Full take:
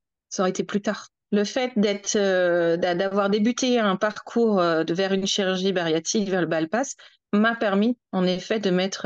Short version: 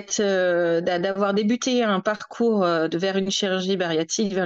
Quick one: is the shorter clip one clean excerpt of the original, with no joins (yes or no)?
yes